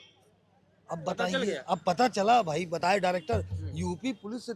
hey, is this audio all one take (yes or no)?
yes